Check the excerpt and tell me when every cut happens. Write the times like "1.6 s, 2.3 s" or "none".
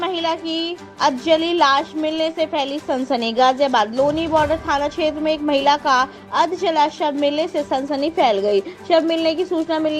none